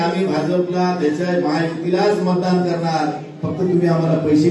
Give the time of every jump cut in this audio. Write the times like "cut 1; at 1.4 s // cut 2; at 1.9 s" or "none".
none